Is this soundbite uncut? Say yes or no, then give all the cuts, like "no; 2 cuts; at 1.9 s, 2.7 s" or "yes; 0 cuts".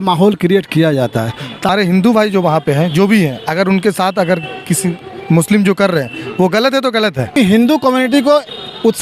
no; 2 cuts; at 1.7 s, 7.4 s